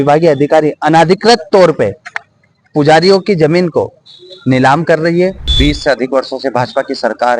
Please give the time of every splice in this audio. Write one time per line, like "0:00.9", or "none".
0:05.5

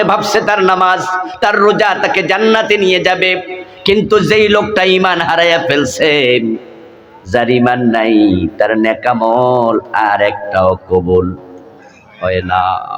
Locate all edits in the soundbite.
none

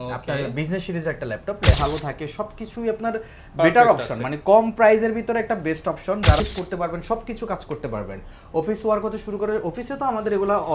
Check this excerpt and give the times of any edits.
0:01.8
0:06.4

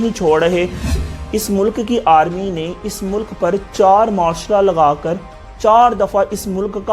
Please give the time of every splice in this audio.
0:01.0

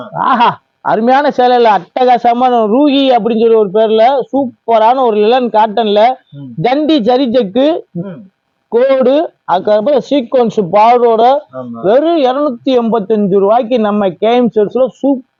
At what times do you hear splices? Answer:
none

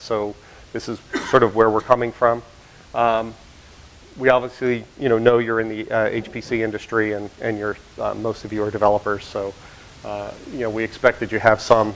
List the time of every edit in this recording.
0:04.5

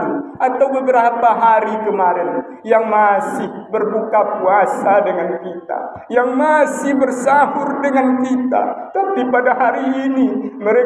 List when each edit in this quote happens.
none

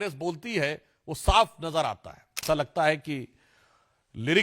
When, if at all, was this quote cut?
0:02.4

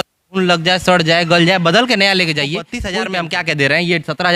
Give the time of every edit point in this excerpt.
0:02.8

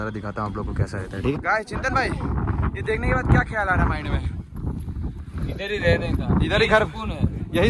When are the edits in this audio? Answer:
0:01.4

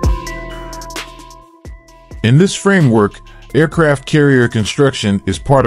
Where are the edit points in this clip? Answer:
0:02.1

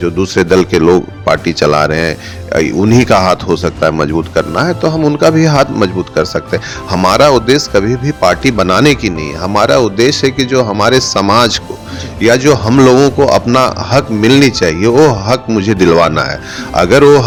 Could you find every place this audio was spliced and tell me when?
none

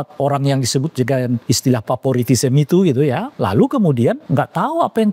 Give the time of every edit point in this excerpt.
0:01.4
0:03.3
0:04.2

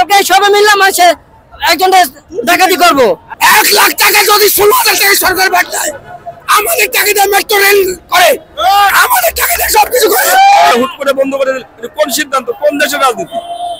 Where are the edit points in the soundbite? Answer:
0:03.3
0:10.7

